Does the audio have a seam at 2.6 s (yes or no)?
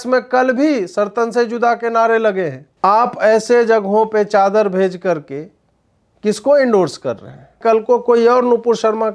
yes